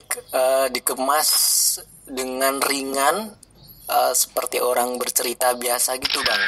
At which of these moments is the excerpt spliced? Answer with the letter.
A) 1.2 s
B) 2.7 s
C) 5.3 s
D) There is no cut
D